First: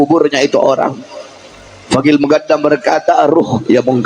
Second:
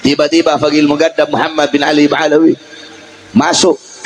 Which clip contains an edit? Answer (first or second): first